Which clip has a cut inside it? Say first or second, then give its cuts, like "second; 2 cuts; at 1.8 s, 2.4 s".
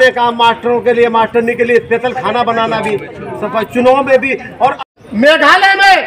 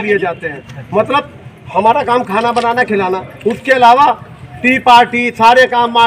first; 1 cut; at 5.0 s